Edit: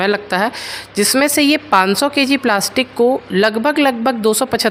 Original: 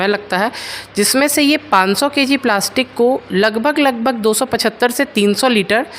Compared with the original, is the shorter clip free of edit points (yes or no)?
yes